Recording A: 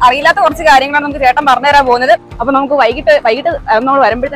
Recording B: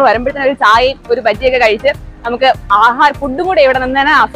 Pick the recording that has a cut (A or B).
A